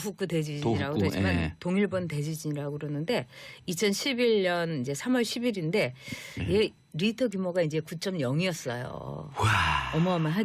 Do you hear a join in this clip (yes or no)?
yes